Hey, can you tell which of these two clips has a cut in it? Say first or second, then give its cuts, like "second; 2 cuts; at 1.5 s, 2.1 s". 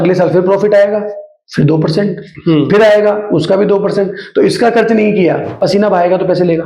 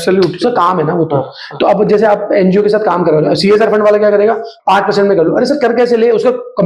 first; 1 cut; at 5.5 s